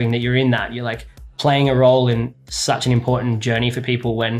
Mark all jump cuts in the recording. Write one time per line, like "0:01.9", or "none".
0:01.1
0:02.3

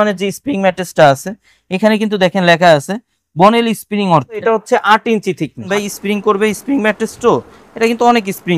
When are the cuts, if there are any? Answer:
0:04.4
0:05.7

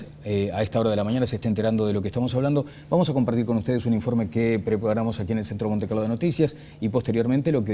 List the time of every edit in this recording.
0:01.4

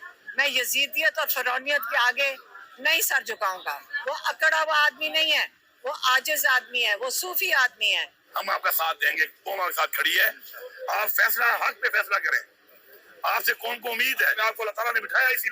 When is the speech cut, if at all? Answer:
0:03.9
0:08.1
0:14.4

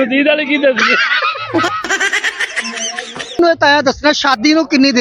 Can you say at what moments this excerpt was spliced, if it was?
0:03.4

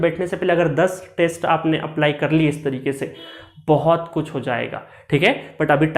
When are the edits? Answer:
none

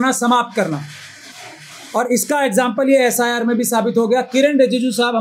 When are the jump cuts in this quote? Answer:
none

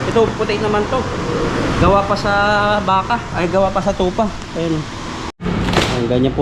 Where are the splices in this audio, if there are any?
0:05.3

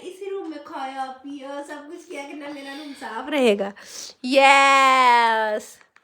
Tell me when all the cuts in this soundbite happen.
none

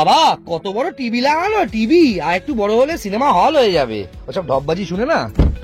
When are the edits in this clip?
none

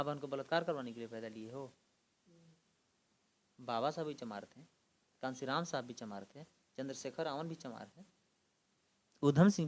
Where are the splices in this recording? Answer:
none

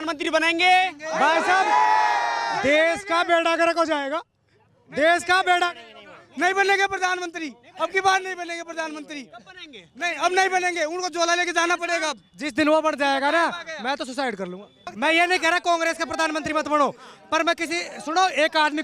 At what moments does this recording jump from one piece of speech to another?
0:14.8

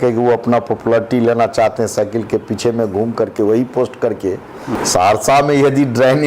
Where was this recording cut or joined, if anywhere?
0:04.8

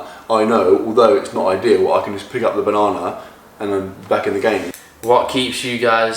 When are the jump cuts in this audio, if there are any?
0:04.7

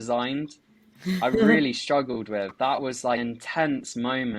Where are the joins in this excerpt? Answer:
0:03.2

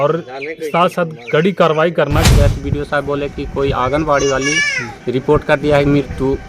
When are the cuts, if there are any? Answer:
0:02.3

